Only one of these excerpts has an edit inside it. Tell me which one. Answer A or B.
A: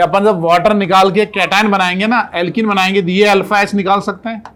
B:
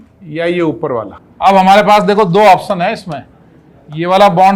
B